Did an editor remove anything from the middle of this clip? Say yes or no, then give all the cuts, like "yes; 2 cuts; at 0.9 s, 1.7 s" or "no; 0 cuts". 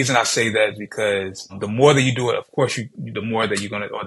yes; 1 cut; at 1.6 s